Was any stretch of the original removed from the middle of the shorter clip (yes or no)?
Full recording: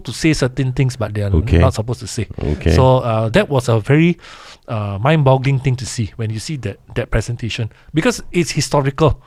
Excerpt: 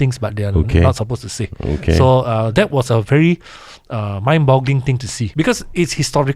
yes